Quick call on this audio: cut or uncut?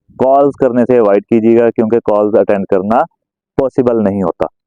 uncut